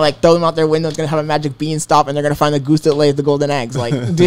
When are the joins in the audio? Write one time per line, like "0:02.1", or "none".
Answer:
none